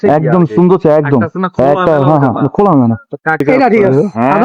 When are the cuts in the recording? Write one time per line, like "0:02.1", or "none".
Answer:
0:03.4